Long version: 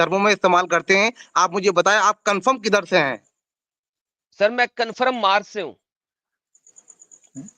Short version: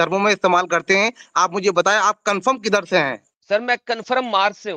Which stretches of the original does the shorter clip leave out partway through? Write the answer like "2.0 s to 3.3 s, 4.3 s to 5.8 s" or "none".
3.3 s to 4.2 s